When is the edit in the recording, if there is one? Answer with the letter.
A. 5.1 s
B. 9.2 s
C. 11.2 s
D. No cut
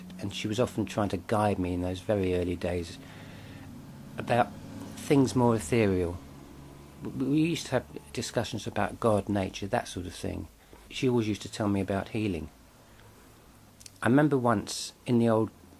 D